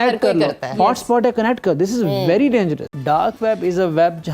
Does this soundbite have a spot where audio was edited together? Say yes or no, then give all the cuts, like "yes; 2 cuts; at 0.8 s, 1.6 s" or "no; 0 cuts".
yes; 1 cut; at 2.9 s